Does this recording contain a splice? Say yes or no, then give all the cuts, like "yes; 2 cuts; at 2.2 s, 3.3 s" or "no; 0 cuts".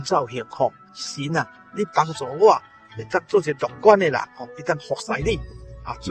yes; 1 cut; at 0.9 s